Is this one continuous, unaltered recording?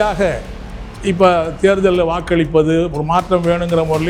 yes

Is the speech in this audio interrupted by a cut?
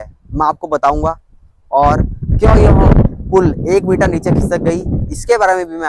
no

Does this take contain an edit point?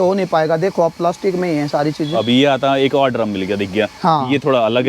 no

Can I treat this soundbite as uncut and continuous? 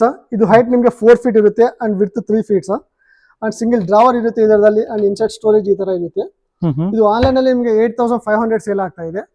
yes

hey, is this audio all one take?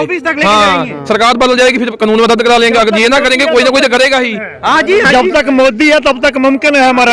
yes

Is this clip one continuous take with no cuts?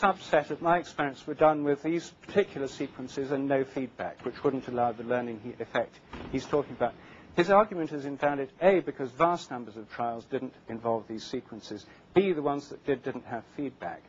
no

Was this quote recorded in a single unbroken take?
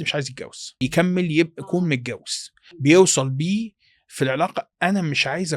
no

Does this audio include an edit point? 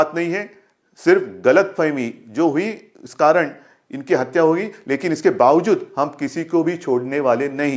no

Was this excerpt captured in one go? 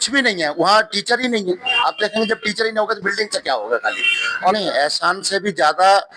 no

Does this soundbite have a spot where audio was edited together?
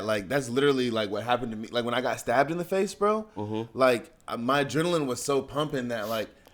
no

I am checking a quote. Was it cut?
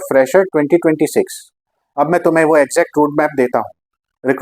no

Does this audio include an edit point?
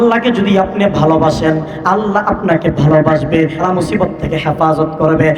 yes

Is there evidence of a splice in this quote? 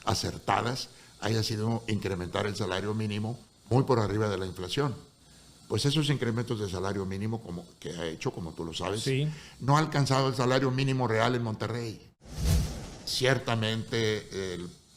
yes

